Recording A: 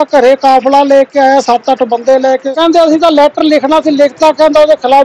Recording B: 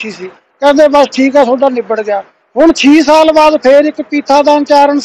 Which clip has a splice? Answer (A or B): A